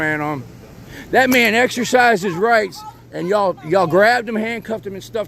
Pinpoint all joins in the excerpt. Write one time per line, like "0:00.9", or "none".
0:00.9